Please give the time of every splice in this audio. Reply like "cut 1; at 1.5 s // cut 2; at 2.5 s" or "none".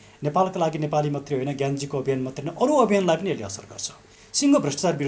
none

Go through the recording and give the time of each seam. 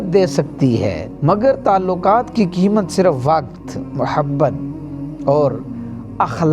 cut 1; at 1.1 s

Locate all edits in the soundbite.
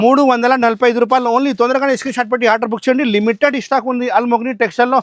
none

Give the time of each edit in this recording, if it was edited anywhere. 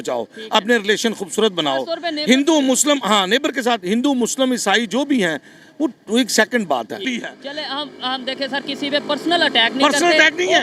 cut 1; at 7.0 s

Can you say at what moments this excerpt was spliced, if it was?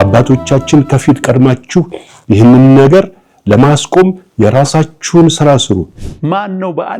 cut 1; at 5.9 s

